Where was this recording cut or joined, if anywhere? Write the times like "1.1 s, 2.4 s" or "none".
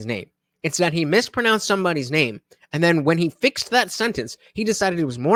none